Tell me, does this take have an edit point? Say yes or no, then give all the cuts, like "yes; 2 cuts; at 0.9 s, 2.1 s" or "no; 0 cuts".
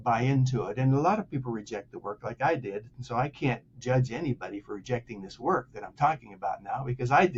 no; 0 cuts